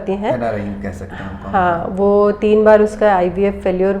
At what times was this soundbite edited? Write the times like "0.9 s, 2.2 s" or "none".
none